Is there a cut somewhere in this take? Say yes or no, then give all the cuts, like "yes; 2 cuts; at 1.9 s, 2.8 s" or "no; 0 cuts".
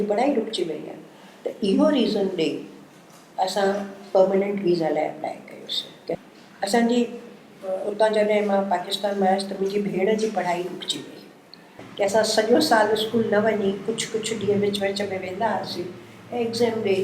yes; 2 cuts; at 6.2 s, 11.7 s